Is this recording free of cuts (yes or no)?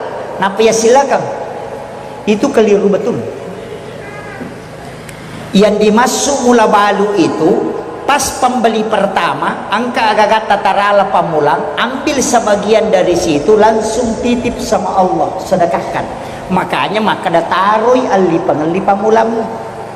yes